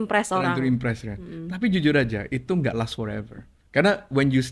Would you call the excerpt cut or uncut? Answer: uncut